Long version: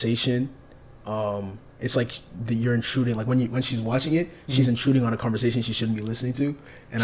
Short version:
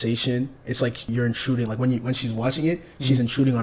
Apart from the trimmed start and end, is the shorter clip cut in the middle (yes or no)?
yes